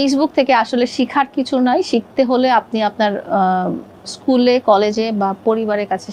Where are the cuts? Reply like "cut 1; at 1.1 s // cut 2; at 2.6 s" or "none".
none